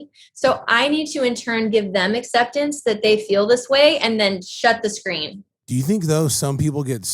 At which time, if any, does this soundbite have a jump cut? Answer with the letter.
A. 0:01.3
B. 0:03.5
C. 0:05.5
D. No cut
C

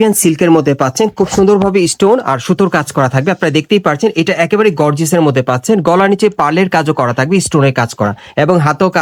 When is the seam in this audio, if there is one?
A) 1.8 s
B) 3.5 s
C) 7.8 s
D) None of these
D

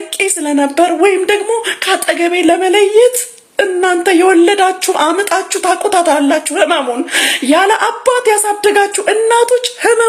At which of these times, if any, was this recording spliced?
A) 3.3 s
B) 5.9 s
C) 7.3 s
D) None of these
D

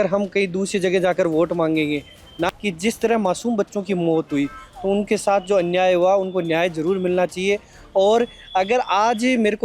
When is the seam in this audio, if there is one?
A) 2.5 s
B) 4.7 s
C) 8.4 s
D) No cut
A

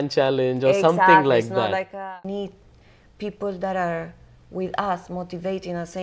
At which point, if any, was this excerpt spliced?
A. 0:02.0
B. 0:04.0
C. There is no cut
A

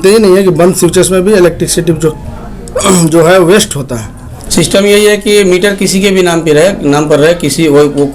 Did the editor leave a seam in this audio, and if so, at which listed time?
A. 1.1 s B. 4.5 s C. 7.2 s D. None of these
B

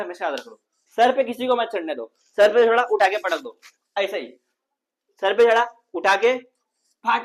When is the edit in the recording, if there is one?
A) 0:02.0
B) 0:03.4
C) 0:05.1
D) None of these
D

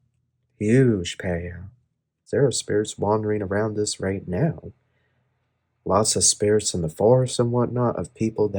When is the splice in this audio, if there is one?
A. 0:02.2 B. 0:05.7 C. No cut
A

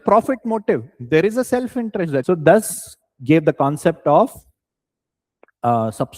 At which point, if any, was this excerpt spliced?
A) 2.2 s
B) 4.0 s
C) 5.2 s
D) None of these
A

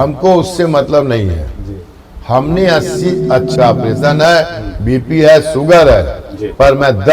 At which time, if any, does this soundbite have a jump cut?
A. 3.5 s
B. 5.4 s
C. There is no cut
A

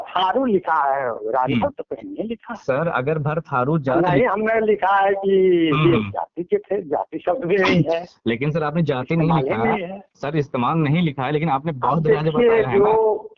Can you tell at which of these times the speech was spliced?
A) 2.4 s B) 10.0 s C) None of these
C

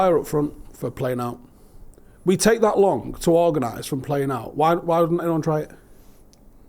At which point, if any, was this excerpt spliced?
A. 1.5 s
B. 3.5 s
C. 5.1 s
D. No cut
D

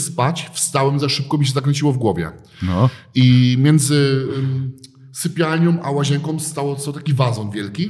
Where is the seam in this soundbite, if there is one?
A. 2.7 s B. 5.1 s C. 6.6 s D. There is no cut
D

